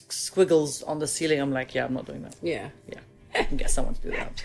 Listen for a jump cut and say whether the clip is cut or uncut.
uncut